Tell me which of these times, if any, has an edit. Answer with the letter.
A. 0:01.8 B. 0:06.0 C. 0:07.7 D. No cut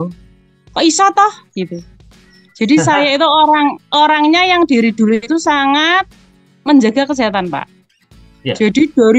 D